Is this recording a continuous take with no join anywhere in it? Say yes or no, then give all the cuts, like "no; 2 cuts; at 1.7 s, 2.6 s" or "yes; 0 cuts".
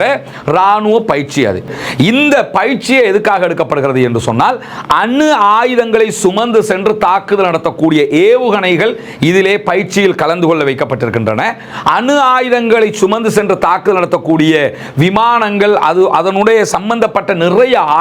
no; 1 cut; at 1.7 s